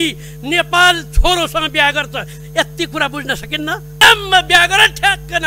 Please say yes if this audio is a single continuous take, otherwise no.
no